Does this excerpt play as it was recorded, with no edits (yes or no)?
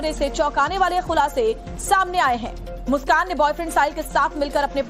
no